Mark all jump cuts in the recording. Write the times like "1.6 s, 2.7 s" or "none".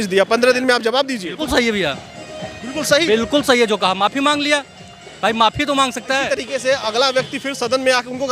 1.4 s